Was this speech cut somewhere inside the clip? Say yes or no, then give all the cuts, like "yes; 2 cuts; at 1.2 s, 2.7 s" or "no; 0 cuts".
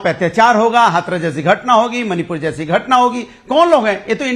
no; 0 cuts